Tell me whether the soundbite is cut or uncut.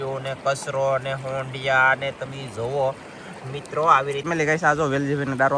cut